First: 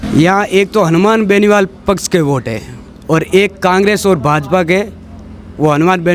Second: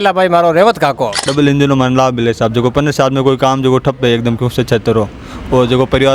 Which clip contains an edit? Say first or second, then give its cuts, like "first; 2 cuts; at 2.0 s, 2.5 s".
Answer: second; 1 cut; at 1.3 s